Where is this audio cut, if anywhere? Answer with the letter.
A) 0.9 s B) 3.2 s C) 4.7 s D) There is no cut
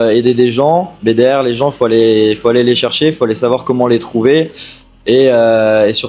D